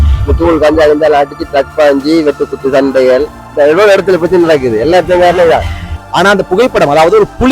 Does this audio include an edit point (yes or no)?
yes